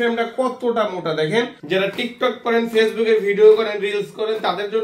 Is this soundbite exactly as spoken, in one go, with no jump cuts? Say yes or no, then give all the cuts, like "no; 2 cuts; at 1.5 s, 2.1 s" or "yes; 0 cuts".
no; 1 cut; at 1.6 s